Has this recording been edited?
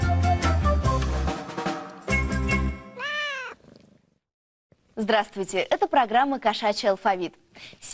yes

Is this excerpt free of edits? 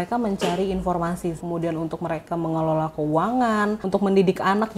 no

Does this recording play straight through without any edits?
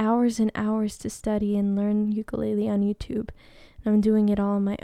yes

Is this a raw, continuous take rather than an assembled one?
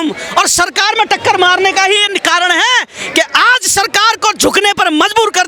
yes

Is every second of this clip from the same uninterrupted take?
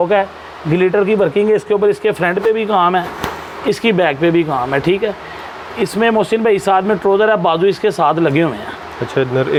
yes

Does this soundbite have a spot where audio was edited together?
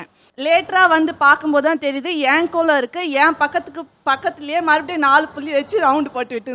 no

